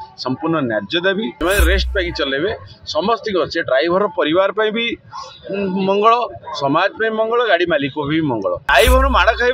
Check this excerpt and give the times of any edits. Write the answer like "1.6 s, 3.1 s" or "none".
1.4 s, 8.7 s